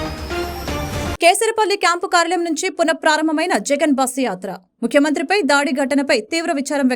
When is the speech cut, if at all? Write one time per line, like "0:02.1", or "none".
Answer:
0:00.9